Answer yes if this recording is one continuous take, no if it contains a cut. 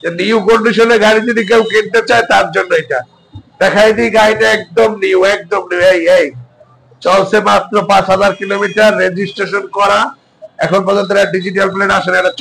yes